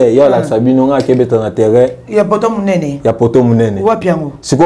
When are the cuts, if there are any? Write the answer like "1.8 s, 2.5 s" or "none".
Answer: none